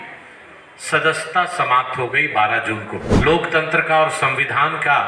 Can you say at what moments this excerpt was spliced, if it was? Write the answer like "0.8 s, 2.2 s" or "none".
3.0 s